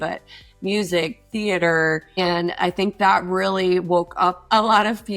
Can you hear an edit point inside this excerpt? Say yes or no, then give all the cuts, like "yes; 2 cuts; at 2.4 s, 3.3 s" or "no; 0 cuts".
yes; 1 cut; at 2.1 s